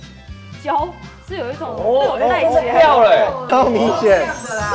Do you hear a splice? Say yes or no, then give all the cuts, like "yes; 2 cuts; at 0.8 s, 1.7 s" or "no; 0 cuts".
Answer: yes; 1 cut; at 3.4 s